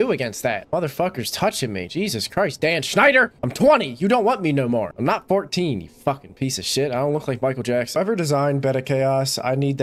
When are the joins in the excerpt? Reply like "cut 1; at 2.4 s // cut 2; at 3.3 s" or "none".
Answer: cut 1; at 3.4 s // cut 2; at 8.0 s